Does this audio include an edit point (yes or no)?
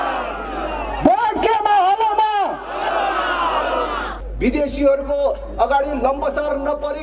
yes